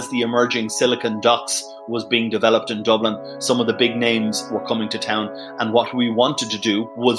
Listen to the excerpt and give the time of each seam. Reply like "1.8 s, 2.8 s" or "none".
none